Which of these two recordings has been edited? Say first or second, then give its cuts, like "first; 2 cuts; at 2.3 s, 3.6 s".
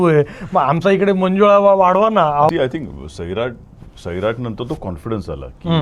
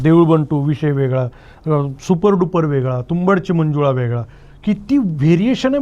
first; 1 cut; at 2.5 s